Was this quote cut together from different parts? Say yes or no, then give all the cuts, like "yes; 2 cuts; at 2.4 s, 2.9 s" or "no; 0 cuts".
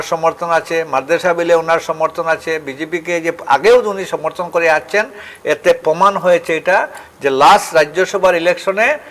no; 0 cuts